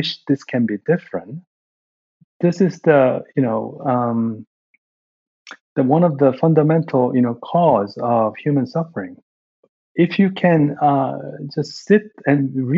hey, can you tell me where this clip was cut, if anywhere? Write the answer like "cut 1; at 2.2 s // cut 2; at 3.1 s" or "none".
cut 1; at 9.8 s